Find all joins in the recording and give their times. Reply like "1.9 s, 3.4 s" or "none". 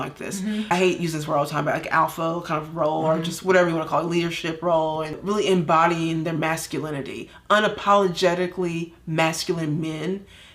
0.7 s, 5.2 s